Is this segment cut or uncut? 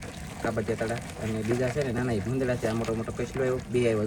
uncut